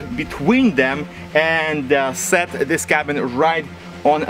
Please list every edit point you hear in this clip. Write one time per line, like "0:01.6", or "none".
none